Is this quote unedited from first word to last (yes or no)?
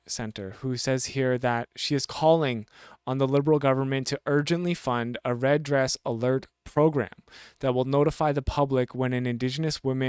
yes